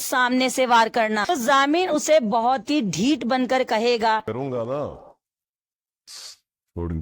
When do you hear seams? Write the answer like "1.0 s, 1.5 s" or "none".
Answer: 1.2 s